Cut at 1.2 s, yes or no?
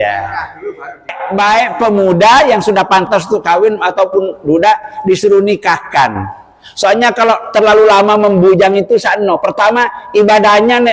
yes